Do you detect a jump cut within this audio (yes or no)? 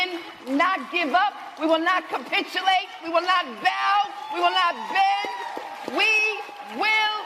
no